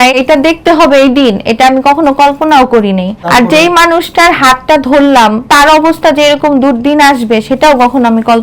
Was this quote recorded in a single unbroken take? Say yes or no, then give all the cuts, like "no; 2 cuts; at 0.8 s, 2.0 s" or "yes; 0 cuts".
no; 2 cuts; at 3.1 s, 5.5 s